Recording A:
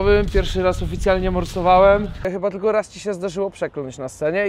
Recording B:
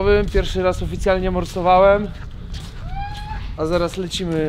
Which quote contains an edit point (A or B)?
A